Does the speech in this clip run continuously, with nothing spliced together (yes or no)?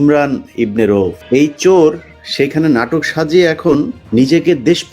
no